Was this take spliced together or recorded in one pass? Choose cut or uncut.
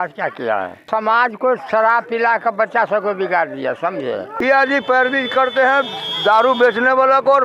cut